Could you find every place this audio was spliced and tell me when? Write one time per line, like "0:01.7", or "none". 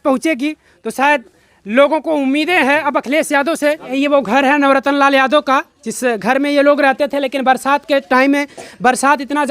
0:04.0